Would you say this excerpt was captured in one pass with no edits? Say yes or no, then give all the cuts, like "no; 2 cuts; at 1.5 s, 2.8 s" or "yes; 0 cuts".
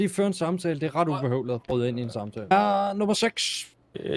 no; 1 cut; at 2.5 s